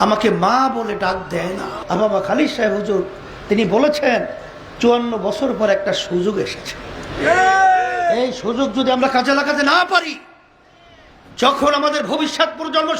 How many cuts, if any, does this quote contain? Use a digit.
1